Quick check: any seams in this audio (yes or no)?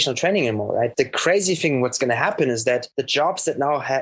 yes